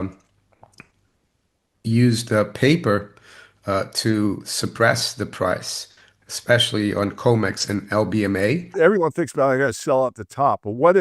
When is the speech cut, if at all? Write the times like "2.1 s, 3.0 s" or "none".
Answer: 8.7 s